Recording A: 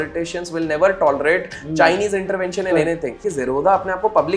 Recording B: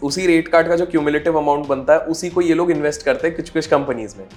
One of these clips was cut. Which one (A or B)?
A